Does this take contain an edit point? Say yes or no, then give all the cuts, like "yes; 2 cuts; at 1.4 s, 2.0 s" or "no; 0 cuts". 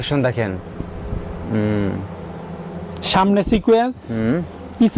no; 0 cuts